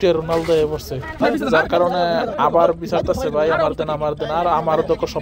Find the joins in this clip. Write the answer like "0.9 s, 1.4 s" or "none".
1.2 s